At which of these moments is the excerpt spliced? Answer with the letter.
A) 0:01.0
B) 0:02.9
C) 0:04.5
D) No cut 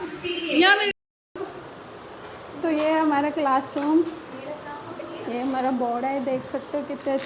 A